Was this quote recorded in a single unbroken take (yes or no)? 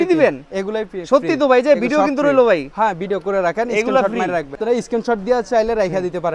no